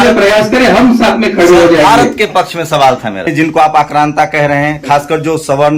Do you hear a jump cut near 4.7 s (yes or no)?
no